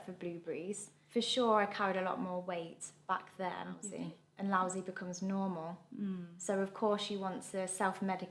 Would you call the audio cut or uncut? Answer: cut